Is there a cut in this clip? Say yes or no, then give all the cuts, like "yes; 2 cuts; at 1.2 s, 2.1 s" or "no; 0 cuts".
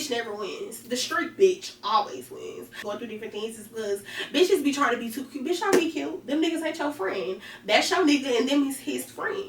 yes; 1 cut; at 2.8 s